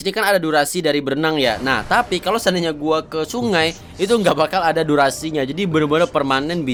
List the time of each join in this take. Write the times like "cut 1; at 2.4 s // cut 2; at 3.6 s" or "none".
none